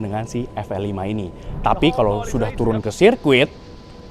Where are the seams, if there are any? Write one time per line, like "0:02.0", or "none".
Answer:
none